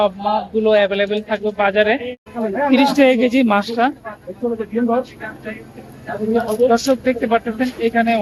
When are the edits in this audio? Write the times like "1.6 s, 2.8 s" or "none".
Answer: 2.3 s